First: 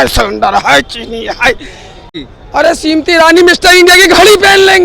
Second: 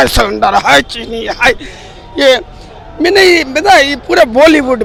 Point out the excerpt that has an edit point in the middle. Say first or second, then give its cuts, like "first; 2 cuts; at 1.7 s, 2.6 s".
first; 1 cut; at 2.1 s